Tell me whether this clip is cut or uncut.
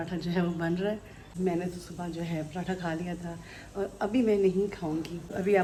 uncut